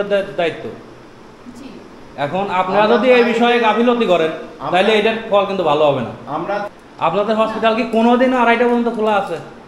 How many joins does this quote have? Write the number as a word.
one